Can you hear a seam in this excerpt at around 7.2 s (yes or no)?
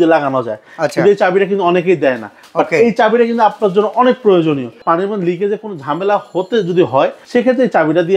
yes